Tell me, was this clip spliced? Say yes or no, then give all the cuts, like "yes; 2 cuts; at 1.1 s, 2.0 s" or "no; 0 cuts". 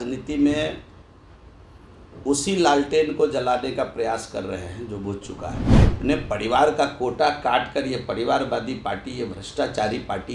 yes; 1 cut; at 6.0 s